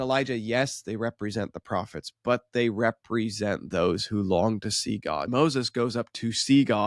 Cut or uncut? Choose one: cut